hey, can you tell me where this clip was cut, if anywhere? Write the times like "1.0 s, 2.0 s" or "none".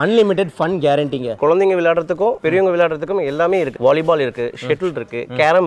1.3 s, 3.7 s